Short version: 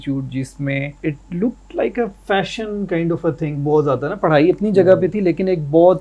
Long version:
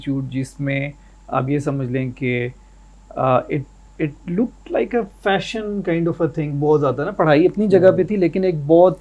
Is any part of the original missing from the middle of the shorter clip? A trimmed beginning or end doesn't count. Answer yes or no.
yes